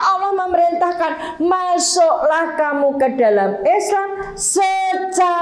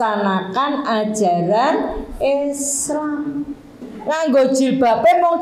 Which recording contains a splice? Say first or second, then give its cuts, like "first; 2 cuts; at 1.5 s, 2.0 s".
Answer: second; 1 cut; at 3.8 s